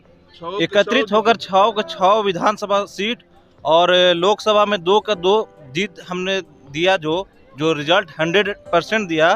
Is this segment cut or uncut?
uncut